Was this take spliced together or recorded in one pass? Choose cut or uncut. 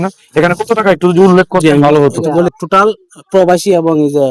cut